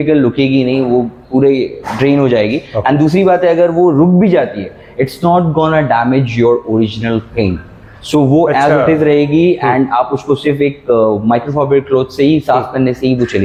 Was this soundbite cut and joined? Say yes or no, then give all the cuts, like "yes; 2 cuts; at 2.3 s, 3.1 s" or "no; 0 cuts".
no; 0 cuts